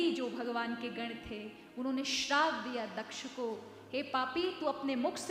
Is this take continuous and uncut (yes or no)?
yes